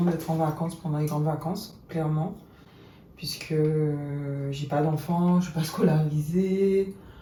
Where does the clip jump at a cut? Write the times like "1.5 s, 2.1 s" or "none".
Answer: none